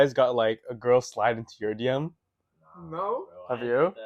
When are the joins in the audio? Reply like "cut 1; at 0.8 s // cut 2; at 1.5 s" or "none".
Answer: none